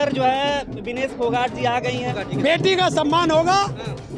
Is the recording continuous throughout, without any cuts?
no; 1 cut; at 2.1 s

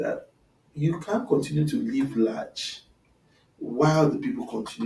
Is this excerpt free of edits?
yes; 0 cuts

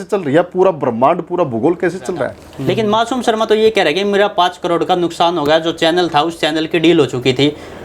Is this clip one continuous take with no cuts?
no; 1 cut; at 2.5 s

